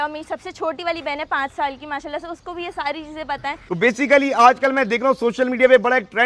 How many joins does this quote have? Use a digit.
1